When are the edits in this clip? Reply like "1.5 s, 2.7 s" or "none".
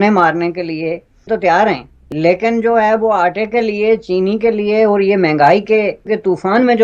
1.2 s